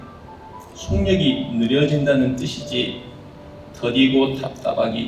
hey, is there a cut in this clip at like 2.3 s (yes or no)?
no